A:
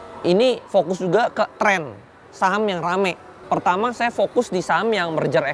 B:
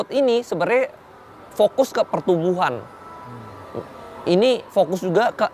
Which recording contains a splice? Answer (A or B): A